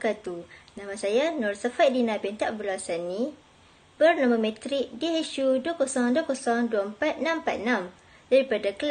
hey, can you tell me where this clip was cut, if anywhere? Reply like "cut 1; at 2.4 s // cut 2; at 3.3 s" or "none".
none